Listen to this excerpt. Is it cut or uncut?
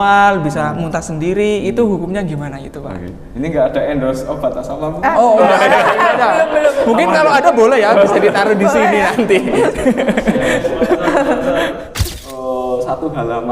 cut